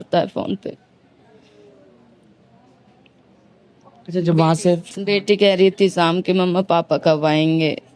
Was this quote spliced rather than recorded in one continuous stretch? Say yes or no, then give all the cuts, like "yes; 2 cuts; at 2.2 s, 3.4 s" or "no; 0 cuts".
no; 0 cuts